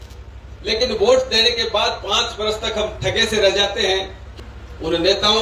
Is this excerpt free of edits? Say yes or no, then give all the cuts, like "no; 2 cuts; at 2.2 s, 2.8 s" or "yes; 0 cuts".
no; 1 cut; at 4.2 s